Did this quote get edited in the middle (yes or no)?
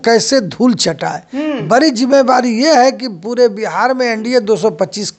no